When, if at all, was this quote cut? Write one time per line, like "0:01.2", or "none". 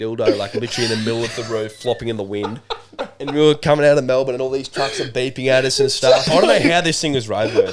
0:06.3